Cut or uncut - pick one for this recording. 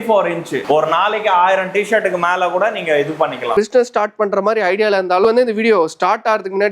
cut